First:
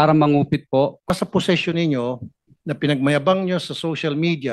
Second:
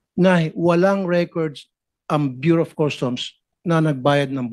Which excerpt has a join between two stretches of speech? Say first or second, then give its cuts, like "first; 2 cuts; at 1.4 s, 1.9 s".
first; 1 cut; at 1.1 s